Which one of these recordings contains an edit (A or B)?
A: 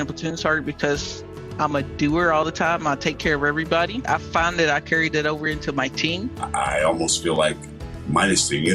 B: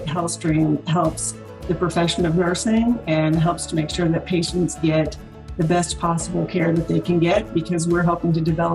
A